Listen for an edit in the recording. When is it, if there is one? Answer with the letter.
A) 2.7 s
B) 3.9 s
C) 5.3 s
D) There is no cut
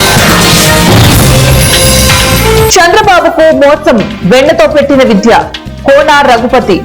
A